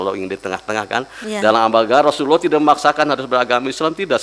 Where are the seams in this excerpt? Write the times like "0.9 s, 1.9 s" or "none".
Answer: 1.2 s